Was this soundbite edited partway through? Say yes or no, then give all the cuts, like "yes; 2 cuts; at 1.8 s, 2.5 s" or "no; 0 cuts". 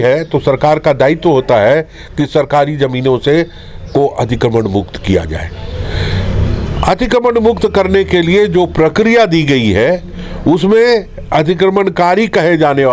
no; 0 cuts